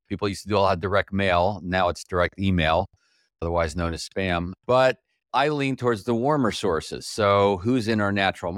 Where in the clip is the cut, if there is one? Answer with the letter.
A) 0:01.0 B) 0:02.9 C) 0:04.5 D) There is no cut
C